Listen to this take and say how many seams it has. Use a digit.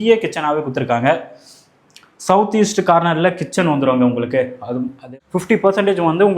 1